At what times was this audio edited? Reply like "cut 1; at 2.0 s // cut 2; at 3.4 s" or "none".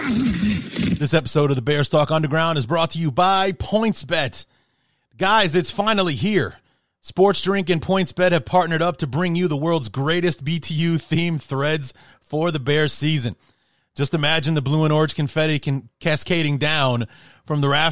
cut 1; at 1.0 s